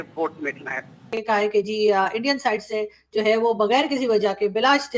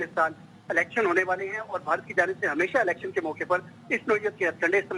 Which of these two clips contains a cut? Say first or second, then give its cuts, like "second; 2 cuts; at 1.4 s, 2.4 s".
first; 1 cut; at 1.1 s